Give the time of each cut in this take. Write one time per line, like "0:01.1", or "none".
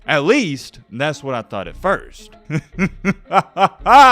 0:02.3